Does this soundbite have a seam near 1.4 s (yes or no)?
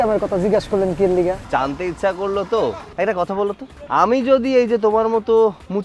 yes